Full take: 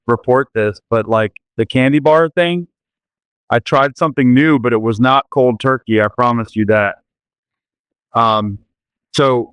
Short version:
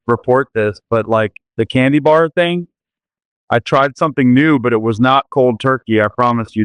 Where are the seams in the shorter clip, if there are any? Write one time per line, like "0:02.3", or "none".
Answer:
none